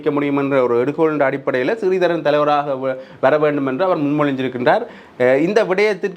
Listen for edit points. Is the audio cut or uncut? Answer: uncut